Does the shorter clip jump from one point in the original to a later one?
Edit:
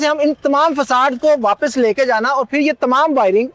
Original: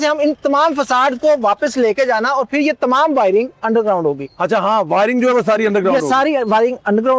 no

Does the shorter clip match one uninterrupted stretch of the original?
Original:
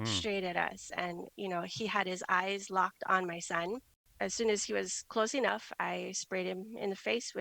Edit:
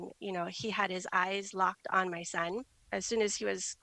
no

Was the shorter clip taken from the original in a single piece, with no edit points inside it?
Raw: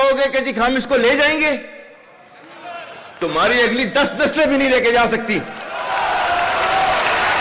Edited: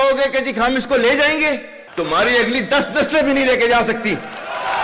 no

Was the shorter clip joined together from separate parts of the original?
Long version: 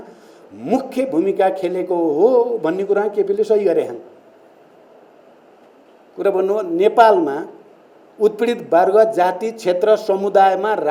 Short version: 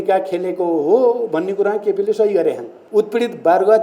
yes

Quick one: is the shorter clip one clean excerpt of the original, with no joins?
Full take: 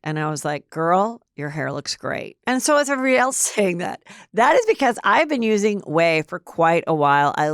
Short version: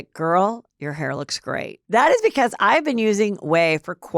no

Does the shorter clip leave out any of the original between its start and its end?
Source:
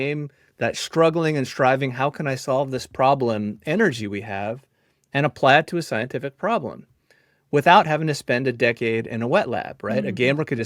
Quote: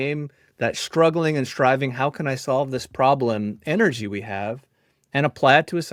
no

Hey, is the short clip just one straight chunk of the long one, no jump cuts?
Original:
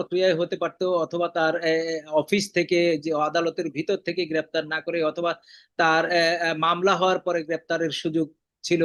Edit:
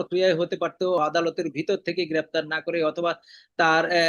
no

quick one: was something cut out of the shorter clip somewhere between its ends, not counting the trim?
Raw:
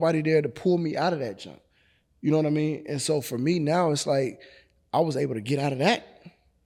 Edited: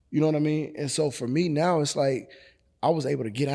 no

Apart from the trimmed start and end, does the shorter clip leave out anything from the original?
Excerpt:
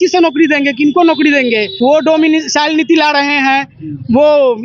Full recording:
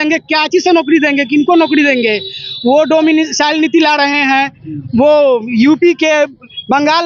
yes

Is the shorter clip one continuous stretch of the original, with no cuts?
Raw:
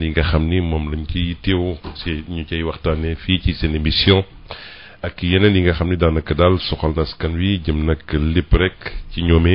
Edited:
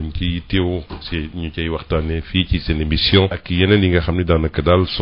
no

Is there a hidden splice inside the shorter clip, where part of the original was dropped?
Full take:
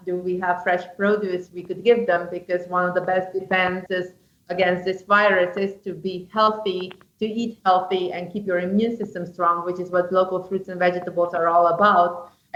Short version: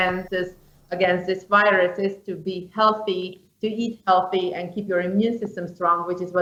no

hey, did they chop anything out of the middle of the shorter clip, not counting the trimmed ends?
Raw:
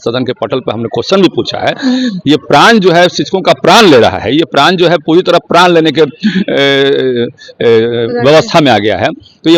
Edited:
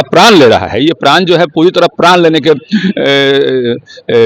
no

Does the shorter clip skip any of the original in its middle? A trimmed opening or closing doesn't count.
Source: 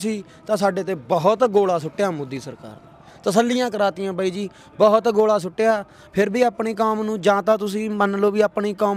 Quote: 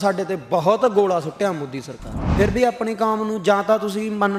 yes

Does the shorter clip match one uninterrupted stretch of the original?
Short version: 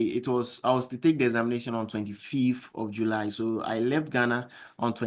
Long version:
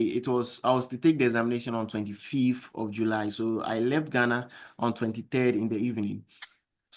yes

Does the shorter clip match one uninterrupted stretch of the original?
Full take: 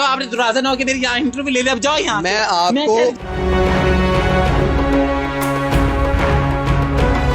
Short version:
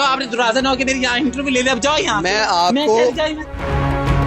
no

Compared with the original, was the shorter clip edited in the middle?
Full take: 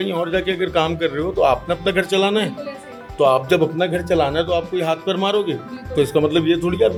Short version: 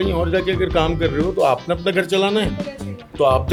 no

